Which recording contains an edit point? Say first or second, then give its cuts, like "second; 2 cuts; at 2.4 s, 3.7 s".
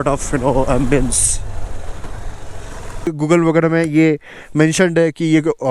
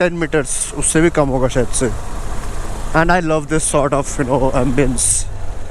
first; 1 cut; at 3.1 s